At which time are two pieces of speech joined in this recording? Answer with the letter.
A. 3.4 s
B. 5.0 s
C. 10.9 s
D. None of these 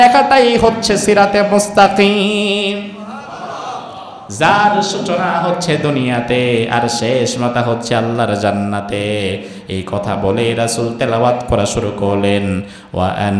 D